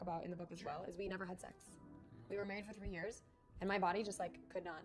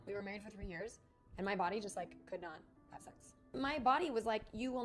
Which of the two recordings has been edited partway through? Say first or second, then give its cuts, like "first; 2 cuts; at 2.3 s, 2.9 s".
second; 1 cut; at 3.5 s